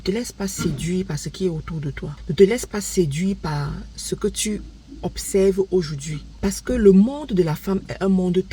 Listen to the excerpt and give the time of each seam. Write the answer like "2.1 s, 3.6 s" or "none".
none